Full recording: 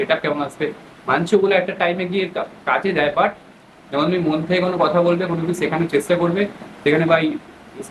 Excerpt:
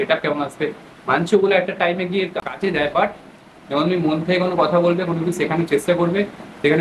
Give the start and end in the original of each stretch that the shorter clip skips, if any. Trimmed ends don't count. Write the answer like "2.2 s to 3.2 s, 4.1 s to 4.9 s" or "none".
2.4 s to 2.7 s